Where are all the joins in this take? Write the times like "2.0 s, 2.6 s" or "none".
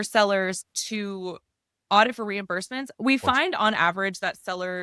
2.9 s